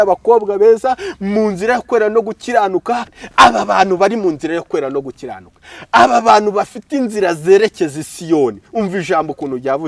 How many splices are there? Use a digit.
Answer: 1